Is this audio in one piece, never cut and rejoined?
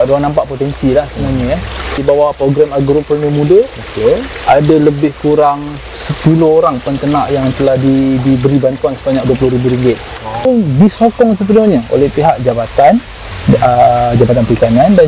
no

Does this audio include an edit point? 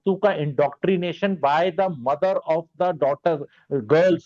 no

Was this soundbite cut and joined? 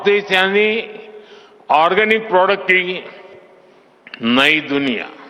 yes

